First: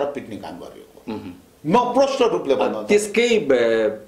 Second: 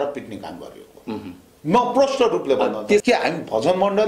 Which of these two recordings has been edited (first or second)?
second